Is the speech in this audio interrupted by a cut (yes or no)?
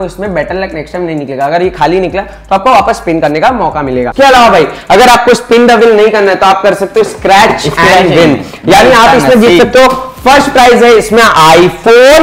yes